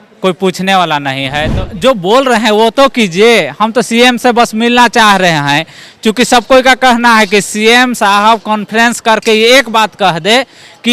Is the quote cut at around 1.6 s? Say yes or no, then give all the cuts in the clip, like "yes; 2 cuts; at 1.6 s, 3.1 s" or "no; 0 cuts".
yes; 1 cut; at 1.6 s